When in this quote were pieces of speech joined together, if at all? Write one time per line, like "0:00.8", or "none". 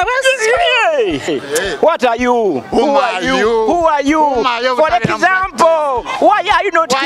0:01.3